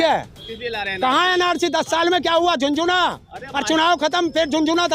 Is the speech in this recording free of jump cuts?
yes; 0 cuts

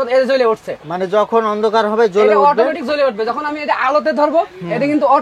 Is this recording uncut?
yes; 0 cuts

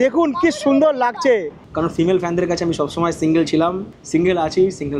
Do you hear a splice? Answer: yes; 2 cuts; at 1.6 s, 3.9 s

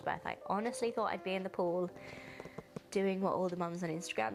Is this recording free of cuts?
yes; 0 cuts

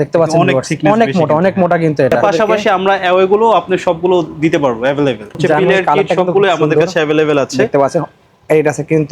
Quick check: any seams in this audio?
yes; 2 cuts; at 2.2 s, 5.4 s

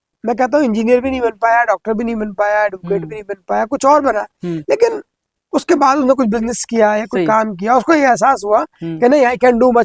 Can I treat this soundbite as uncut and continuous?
yes; 0 cuts

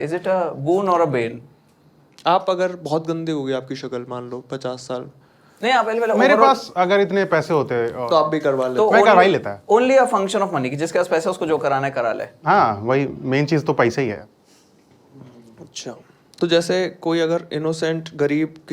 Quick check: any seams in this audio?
no; 0 cuts

